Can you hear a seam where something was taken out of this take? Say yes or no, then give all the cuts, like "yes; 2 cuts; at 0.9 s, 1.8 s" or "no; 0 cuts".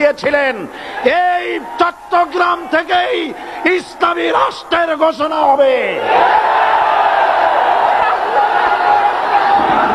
no; 0 cuts